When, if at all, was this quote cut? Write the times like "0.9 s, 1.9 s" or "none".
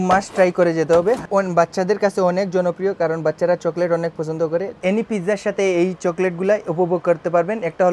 1.2 s, 4.8 s